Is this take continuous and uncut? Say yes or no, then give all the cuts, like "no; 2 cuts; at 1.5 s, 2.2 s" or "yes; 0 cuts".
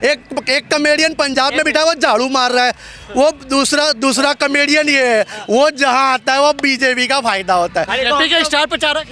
yes; 0 cuts